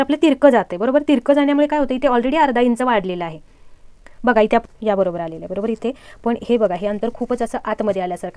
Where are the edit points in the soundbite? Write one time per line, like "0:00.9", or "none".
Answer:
0:04.6